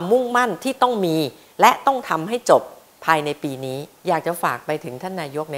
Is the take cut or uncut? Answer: cut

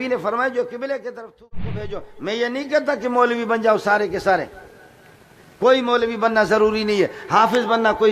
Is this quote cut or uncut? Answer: cut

